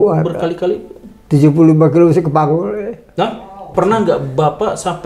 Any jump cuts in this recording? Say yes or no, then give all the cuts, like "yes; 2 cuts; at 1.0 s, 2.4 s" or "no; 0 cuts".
yes; 1 cut; at 3.7 s